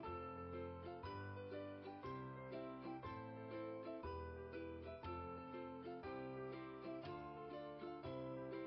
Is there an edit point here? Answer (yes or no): no